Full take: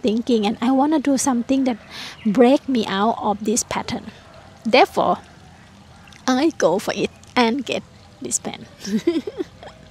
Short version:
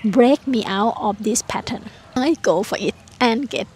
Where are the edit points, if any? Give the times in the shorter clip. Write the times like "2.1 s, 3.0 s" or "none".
2.2 s